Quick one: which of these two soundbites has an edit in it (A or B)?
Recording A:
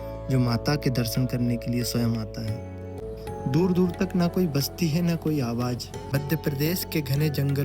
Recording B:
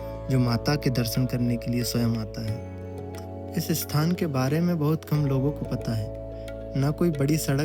A